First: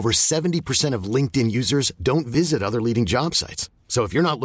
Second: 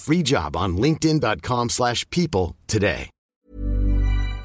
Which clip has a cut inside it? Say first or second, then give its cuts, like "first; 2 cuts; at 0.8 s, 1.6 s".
second; 1 cut; at 3.2 s